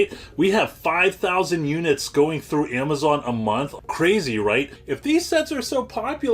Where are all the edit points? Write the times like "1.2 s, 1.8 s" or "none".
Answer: 3.7 s, 4.8 s

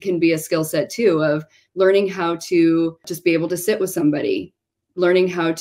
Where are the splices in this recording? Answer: 3.1 s

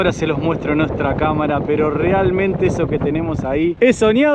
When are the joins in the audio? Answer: none

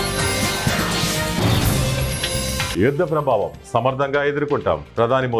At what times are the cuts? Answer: 2.7 s

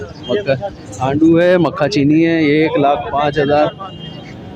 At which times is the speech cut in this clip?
none

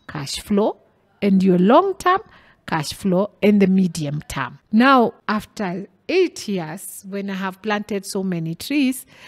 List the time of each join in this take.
4.5 s, 5.2 s

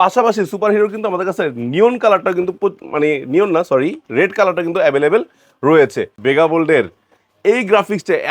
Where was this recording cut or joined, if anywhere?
6.1 s

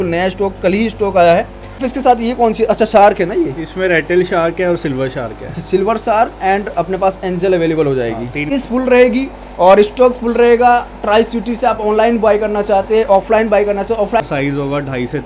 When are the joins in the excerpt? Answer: 1.9 s, 8.5 s, 14.2 s

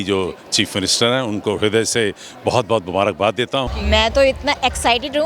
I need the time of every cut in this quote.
3.7 s

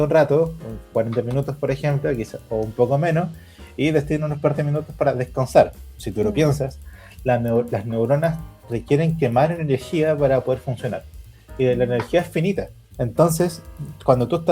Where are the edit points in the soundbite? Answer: 12.8 s

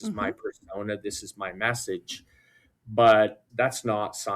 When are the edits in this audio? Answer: 3.4 s

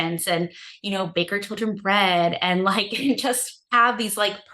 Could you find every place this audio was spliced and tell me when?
3.5 s

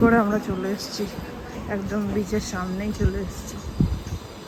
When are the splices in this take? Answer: none

